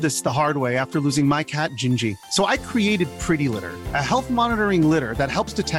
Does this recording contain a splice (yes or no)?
no